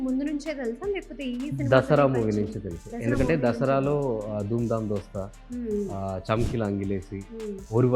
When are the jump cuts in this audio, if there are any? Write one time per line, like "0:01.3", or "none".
none